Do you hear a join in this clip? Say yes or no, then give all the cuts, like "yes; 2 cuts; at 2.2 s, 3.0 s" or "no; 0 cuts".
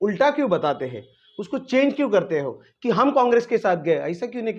no; 0 cuts